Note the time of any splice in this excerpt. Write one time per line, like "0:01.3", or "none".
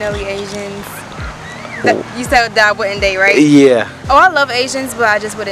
none